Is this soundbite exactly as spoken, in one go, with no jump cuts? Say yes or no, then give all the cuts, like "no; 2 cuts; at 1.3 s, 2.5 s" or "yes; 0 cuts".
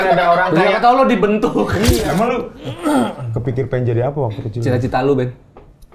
no; 1 cut; at 2.0 s